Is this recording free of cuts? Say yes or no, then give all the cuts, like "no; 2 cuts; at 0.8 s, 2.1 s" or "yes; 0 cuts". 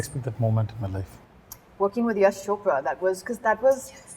no; 1 cut; at 1.2 s